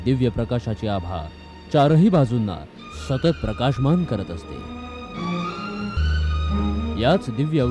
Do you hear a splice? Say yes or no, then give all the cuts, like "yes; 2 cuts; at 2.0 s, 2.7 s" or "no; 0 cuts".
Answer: yes; 1 cut; at 6.0 s